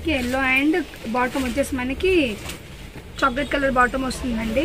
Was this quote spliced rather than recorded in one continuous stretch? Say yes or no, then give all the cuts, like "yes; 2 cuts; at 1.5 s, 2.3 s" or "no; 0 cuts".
no; 0 cuts